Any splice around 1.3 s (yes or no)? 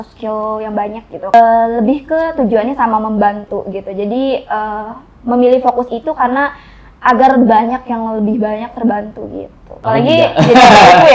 yes